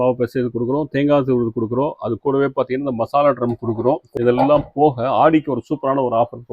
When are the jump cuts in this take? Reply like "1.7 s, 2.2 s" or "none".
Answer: 4.1 s